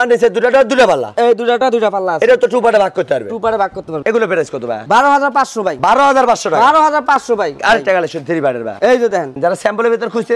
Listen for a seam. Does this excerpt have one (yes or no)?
no